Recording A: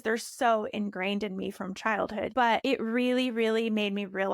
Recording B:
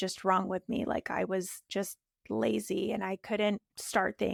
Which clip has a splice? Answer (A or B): A